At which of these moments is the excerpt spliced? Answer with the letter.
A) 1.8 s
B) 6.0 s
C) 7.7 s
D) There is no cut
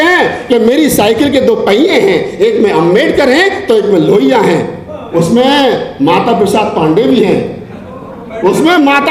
D